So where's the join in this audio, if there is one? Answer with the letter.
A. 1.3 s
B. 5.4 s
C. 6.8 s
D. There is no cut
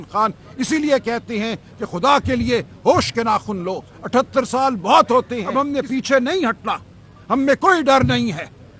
B